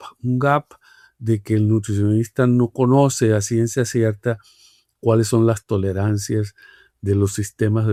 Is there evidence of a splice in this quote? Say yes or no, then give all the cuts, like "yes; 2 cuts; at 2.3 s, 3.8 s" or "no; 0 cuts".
no; 0 cuts